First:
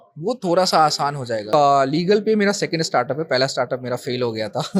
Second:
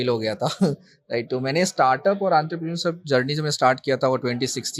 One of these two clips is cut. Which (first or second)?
first